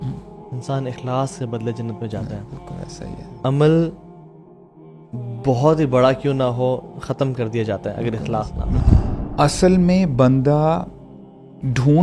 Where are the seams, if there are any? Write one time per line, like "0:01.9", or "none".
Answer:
0:08.8